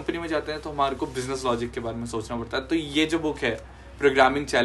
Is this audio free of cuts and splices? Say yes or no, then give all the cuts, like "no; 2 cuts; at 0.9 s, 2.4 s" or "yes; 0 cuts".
yes; 0 cuts